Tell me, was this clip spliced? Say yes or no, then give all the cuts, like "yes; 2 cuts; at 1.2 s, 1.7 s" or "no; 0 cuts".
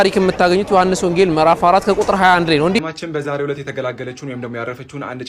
yes; 1 cut; at 2.8 s